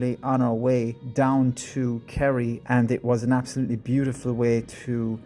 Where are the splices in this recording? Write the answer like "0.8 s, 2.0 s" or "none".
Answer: 1.0 s, 2.6 s